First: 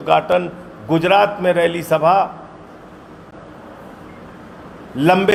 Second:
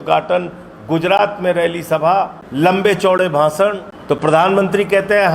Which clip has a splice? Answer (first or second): second